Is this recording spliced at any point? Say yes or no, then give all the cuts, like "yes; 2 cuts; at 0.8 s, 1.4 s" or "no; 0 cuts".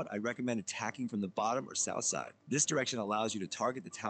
no; 0 cuts